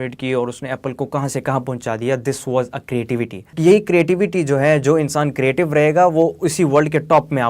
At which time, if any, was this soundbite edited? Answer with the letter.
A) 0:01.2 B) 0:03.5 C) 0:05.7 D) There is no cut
B